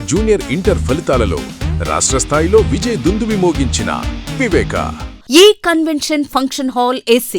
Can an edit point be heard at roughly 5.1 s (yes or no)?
yes